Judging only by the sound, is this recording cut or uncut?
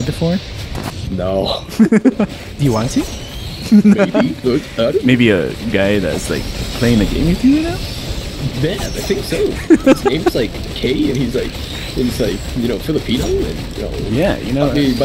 uncut